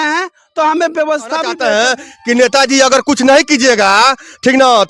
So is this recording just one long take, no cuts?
no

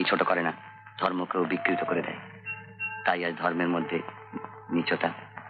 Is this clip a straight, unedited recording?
yes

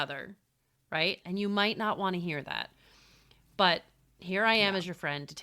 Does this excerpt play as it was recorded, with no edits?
no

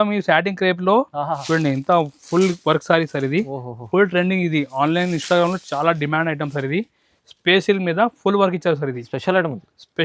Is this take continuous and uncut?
no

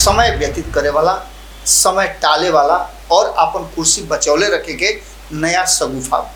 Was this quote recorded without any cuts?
yes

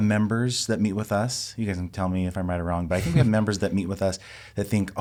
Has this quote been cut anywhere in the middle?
no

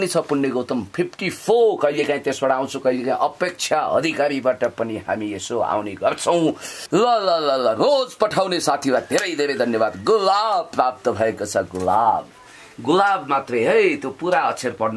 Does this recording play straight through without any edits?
no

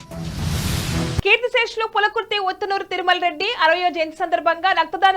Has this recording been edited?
yes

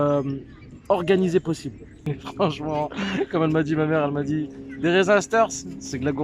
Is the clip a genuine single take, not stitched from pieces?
no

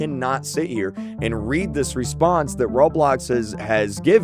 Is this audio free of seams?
yes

